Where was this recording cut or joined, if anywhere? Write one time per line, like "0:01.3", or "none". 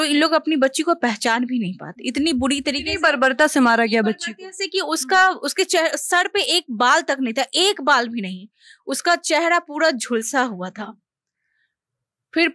none

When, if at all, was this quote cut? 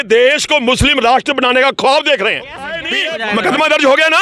0:02.9

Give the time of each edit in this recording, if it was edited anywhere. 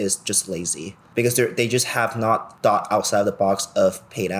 0:01.0
0:02.5

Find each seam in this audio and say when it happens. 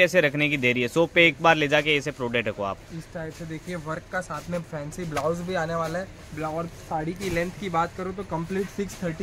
none

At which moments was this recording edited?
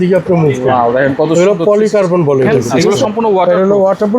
0:02.5

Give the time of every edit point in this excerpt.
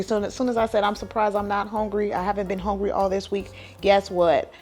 none

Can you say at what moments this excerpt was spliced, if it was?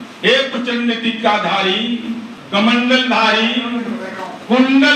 0:02.3

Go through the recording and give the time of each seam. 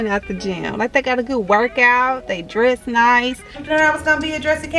0:03.6

